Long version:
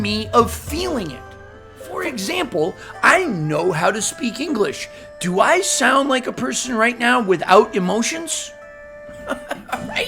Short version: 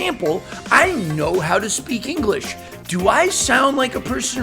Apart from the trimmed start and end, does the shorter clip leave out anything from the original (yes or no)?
no